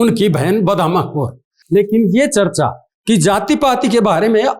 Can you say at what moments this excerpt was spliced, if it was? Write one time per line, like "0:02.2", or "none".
0:01.6